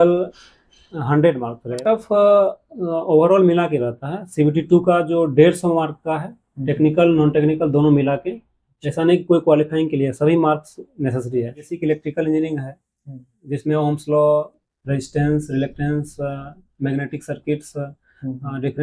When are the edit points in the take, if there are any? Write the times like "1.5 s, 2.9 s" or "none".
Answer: 1.8 s, 11.7 s